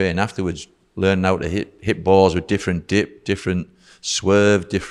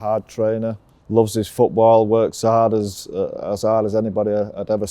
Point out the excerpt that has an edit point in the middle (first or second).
second